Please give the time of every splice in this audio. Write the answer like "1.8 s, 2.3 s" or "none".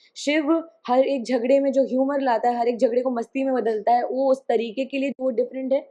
none